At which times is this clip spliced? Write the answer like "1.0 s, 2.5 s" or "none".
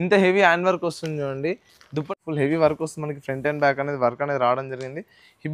2.2 s